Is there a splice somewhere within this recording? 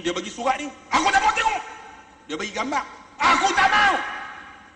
no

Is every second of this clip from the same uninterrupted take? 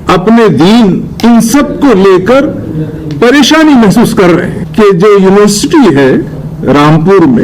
no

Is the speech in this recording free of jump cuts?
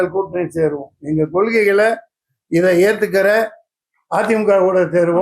yes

